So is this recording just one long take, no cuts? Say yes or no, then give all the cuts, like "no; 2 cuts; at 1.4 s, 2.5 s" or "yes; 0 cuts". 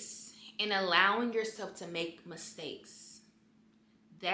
yes; 0 cuts